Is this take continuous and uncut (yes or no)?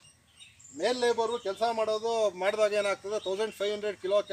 yes